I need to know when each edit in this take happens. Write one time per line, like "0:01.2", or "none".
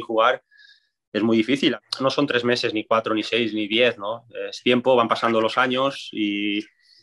0:01.7